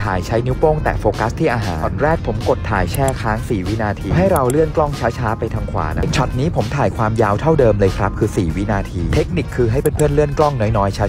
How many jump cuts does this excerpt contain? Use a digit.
2